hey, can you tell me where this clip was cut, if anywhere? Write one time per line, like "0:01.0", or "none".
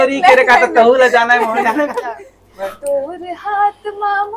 0:02.0